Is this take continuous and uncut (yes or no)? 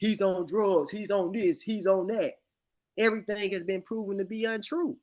yes